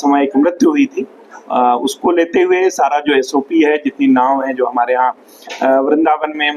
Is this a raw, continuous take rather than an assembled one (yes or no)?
yes